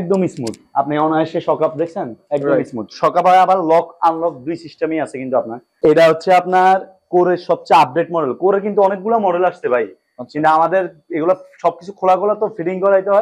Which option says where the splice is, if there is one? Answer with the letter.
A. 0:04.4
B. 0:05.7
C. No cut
B